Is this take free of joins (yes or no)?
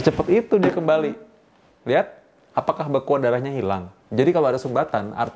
no